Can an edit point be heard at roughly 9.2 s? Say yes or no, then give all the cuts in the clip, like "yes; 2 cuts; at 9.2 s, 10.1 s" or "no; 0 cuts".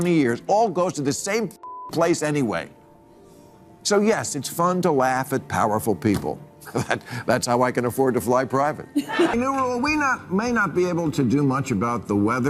yes; 1 cut; at 9.2 s